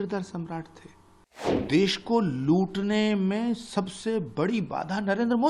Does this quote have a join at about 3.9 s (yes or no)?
no